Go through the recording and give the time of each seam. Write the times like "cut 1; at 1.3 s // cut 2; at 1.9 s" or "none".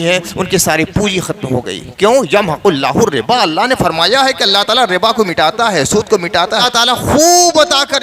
cut 1; at 6.6 s